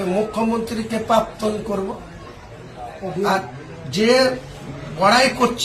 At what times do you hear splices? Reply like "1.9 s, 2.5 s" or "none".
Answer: none